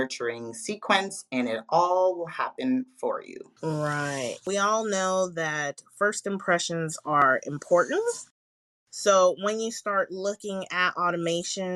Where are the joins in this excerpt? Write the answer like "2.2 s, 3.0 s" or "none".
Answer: 3.4 s, 4.4 s